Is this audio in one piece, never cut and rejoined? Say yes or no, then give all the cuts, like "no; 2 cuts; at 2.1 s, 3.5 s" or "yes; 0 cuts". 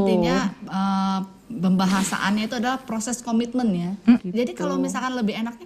no; 1 cut; at 4.2 s